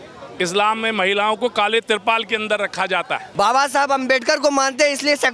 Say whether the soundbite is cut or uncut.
cut